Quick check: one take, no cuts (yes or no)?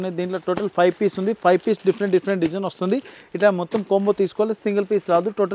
yes